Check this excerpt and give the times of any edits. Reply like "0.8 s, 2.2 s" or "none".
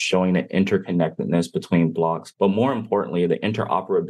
2.3 s